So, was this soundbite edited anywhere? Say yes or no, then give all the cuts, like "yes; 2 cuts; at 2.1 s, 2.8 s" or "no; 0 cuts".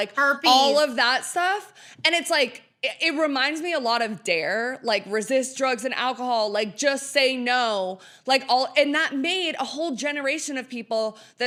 no; 0 cuts